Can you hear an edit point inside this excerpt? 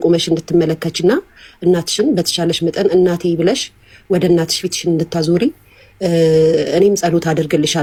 no; 0 cuts

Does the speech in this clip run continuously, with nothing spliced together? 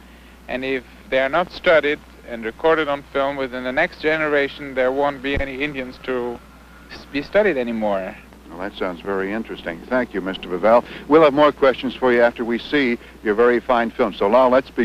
no; 1 cut; at 8.9 s

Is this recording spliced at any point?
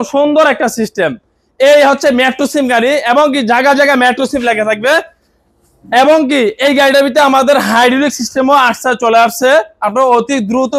no; 0 cuts

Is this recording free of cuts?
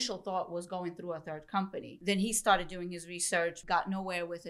no; 2 cuts; at 1.9 s, 3.6 s

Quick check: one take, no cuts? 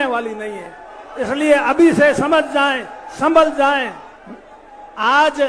yes; 0 cuts

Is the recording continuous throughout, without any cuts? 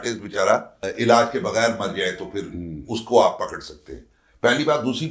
yes; 0 cuts

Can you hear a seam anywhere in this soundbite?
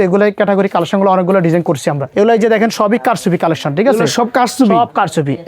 yes; 1 cut; at 2.0 s

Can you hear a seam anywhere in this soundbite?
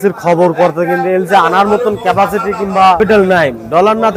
yes; 1 cut; at 3.0 s

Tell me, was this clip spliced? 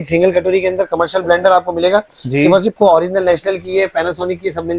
yes; 1 cut; at 2.7 s

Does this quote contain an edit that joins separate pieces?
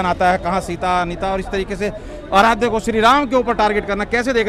no; 0 cuts

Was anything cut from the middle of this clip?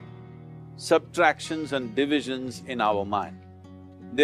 no; 0 cuts

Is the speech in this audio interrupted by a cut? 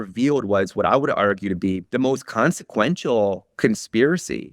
yes; 1 cut; at 1.8 s

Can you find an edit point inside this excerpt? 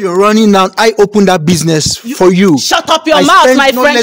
no; 0 cuts

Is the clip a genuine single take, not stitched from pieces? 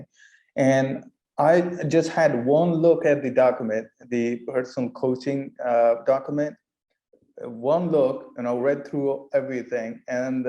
no; 1 cut; at 1.2 s

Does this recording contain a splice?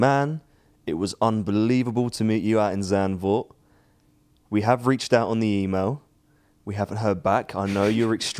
no; 0 cuts

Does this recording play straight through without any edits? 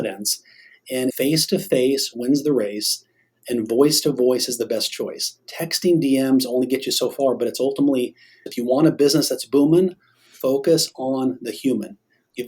no; 2 cuts; at 1.1 s, 8.5 s

